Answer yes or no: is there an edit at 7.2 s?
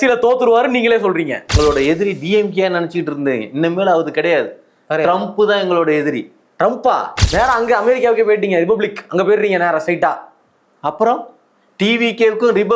yes